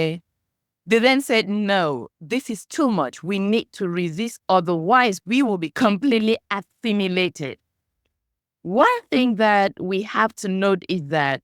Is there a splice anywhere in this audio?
no; 0 cuts

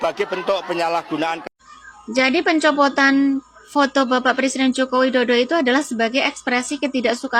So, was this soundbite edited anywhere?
no; 0 cuts

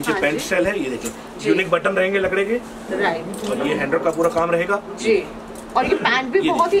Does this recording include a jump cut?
no; 0 cuts

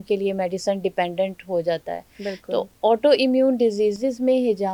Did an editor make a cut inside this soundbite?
no; 0 cuts

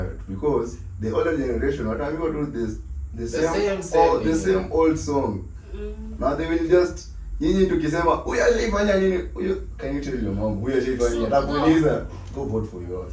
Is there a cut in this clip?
no; 0 cuts

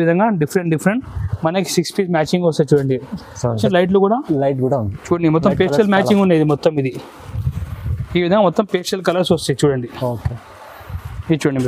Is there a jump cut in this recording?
yes; 1 cut; at 3.6 s

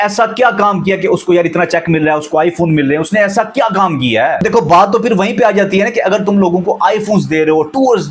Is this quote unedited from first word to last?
no; 1 cut; at 4.4 s

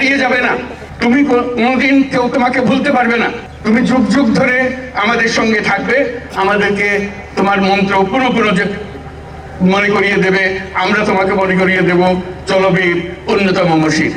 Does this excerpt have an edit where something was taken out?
no; 0 cuts

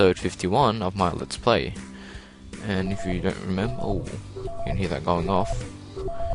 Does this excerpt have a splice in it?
no; 0 cuts

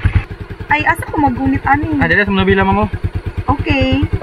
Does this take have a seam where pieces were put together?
no; 0 cuts

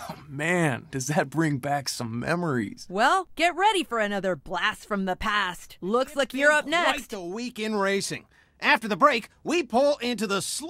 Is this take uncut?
yes; 0 cuts

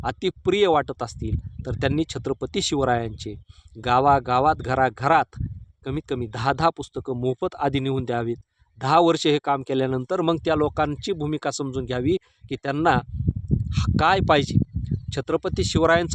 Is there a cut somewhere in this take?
no; 0 cuts

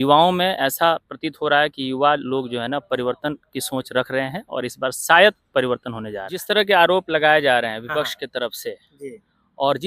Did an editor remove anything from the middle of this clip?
yes; 1 cut; at 6.4 s

